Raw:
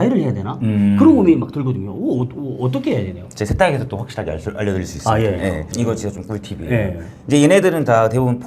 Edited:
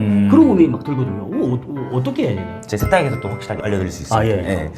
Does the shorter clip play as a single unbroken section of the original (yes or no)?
no